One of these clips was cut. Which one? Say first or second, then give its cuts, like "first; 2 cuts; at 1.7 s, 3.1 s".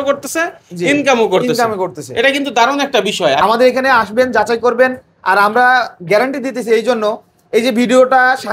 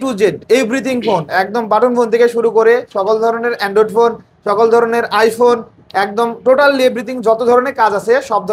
first; 1 cut; at 3.4 s